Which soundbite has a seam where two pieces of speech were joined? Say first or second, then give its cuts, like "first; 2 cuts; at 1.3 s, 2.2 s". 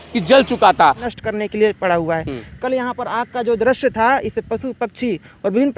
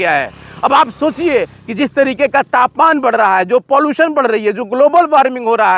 first; 1 cut; at 1.0 s